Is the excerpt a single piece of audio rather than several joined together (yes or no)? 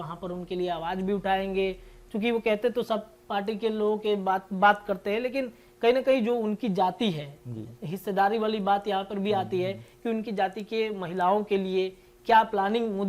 yes